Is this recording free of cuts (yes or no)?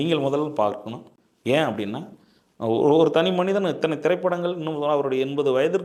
yes